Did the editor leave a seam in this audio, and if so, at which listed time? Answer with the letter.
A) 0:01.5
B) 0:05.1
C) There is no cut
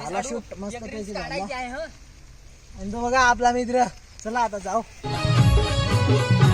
B